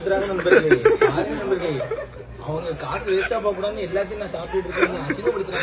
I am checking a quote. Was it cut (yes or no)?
no